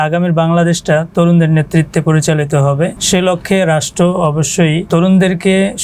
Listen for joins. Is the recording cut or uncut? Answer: cut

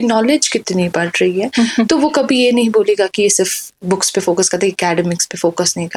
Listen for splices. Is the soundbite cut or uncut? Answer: uncut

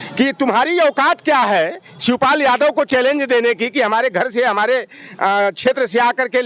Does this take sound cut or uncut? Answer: uncut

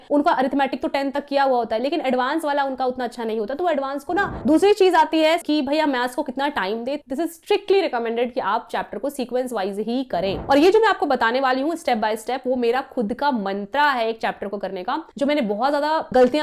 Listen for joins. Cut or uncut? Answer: cut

